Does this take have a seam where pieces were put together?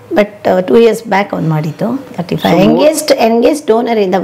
no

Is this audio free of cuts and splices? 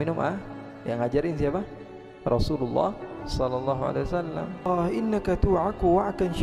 no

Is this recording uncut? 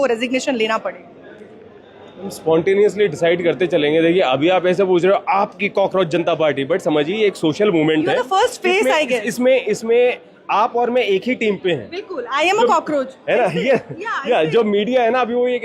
yes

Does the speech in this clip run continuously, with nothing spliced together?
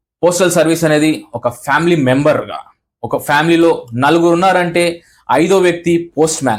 yes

